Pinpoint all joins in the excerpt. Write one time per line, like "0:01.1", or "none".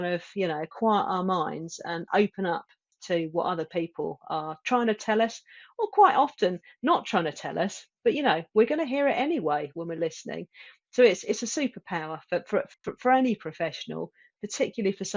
none